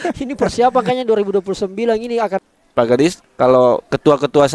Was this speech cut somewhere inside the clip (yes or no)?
yes